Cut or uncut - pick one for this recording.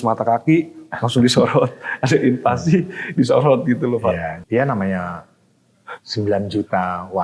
cut